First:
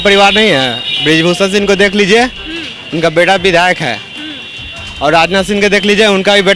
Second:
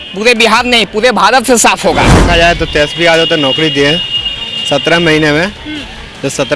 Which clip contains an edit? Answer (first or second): second